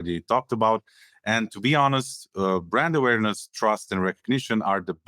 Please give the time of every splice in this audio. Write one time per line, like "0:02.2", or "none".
none